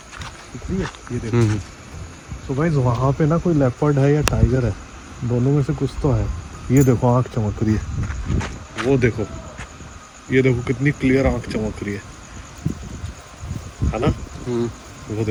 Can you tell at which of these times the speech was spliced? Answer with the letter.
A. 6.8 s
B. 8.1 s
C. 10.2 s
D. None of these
D